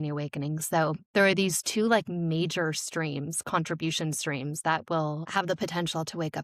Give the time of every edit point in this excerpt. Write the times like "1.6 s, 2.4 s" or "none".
5.3 s